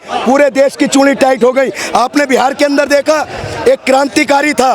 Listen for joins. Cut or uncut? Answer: uncut